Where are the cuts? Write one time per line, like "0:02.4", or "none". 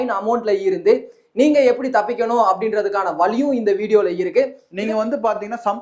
0:04.6